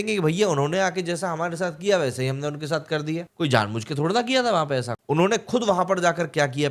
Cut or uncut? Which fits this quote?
cut